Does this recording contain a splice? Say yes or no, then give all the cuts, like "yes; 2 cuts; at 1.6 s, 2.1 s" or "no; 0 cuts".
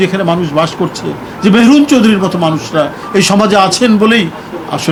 no; 0 cuts